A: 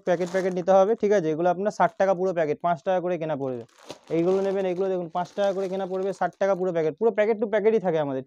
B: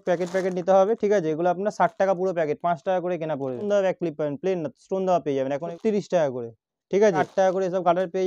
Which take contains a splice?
B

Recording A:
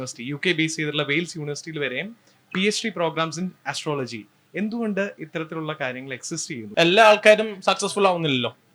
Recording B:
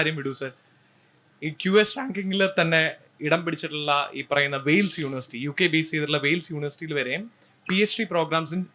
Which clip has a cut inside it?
A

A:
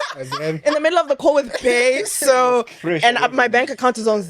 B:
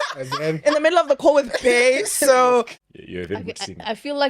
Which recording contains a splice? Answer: B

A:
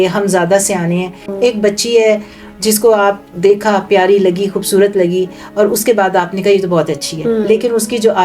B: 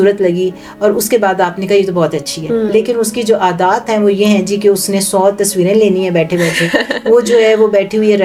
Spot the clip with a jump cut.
A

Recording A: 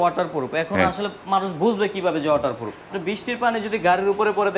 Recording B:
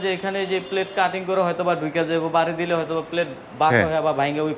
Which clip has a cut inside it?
A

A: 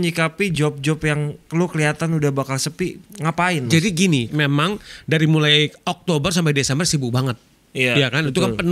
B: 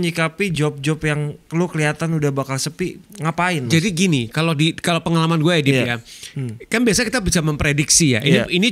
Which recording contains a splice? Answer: A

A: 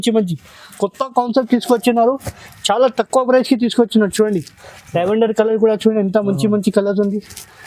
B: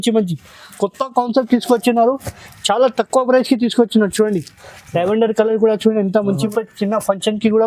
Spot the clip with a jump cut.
B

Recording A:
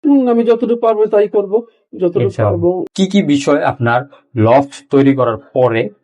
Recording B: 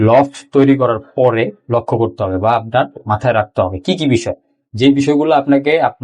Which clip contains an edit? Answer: A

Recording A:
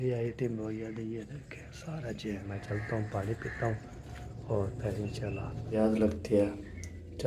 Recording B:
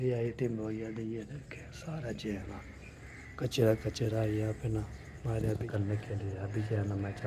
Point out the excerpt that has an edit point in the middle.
A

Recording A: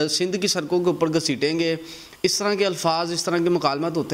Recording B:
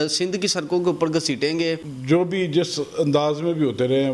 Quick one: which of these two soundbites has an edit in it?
B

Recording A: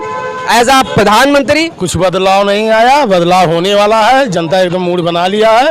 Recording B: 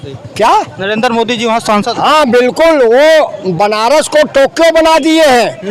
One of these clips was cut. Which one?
A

